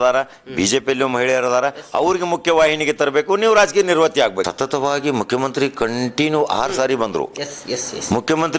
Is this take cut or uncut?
cut